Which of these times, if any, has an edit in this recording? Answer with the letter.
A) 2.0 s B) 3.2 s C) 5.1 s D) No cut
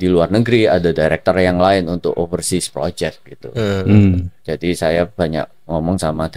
D